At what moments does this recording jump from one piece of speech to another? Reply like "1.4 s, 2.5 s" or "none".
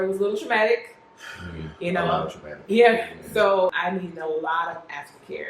3.8 s